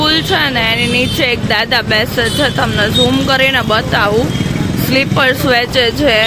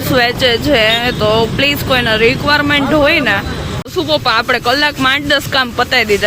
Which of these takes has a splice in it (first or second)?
second